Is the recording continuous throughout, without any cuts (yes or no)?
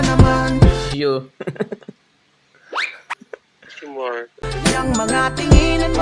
no